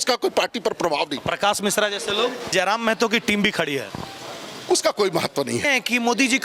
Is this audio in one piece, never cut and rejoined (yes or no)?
no